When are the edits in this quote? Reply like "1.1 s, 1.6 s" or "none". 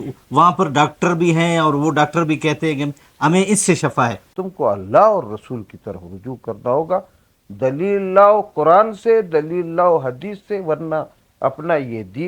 4.3 s